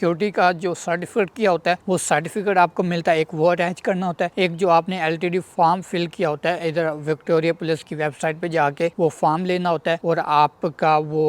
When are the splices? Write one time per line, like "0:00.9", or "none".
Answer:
none